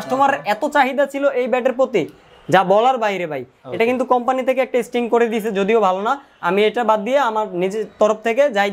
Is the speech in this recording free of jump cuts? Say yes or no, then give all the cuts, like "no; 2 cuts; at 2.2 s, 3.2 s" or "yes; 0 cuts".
yes; 0 cuts